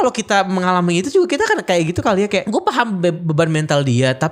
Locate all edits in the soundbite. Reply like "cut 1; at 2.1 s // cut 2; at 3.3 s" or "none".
cut 1; at 2.5 s